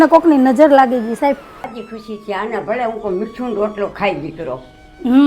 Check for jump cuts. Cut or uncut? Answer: cut